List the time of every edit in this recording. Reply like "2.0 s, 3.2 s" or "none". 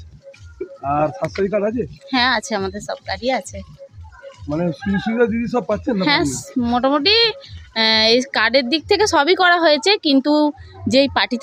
none